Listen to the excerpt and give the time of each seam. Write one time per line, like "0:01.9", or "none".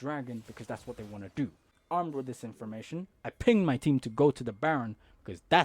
0:01.7